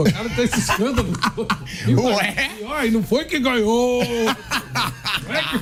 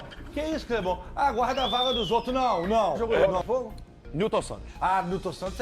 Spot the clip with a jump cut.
second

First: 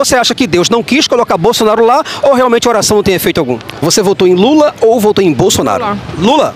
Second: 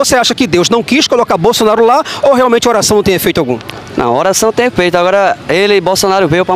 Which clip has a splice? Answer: first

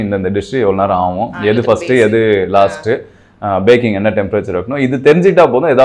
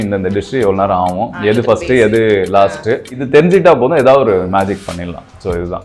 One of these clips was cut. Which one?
second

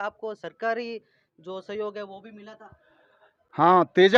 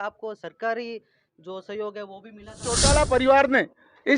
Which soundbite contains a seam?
second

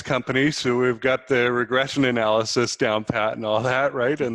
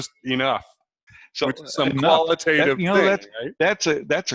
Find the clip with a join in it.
second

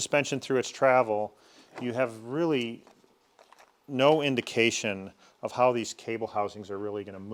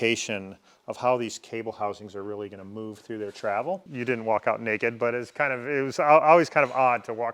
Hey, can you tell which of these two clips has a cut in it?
second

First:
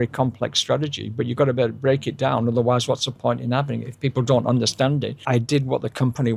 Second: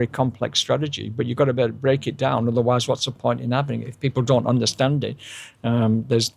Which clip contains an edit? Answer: first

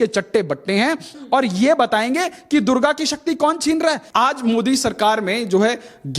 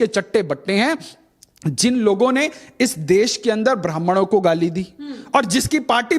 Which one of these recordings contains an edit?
first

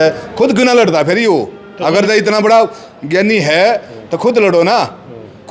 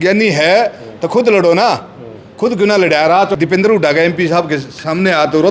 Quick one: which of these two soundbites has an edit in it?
second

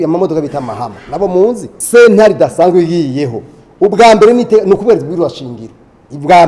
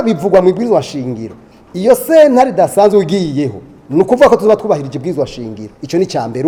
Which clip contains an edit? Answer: first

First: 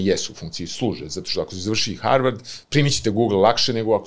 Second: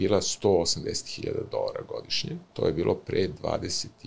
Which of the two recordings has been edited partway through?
second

